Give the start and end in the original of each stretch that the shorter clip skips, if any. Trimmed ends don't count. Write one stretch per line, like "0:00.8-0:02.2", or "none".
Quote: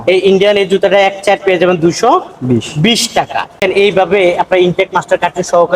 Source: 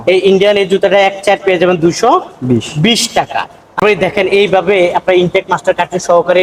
0:03.6-0:04.1